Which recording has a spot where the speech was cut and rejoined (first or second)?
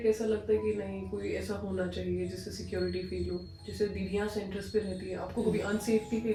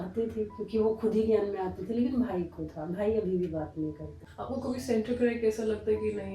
second